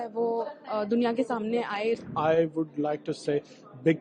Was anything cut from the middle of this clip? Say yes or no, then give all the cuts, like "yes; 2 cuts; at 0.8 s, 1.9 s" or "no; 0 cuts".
yes; 1 cut; at 2.0 s